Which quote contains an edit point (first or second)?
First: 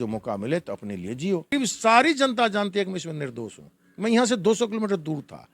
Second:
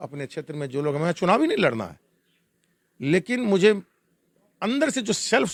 first